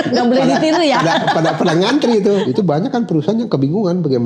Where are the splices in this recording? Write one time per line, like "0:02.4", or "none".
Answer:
0:02.5